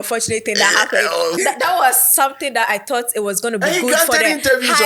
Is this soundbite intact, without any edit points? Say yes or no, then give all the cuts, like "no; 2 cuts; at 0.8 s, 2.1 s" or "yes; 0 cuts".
no; 1 cut; at 1.3 s